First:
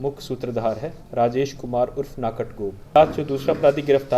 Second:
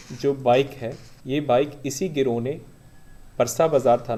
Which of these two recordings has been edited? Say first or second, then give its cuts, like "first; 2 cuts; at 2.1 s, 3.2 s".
first; 1 cut; at 3.0 s